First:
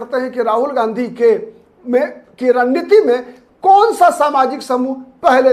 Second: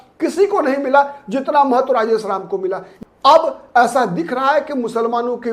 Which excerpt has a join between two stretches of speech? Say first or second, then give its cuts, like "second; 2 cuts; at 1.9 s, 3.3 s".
second; 1 cut; at 2.9 s